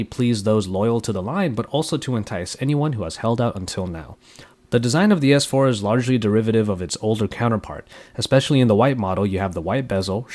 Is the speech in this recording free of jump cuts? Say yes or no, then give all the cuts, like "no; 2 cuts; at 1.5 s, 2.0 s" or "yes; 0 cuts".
yes; 0 cuts